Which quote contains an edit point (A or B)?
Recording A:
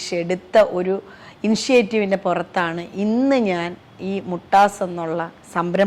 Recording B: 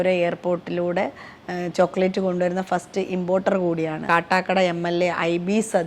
B